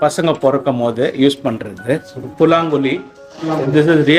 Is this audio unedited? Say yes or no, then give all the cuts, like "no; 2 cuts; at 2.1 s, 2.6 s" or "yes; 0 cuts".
no; 1 cut; at 2.2 s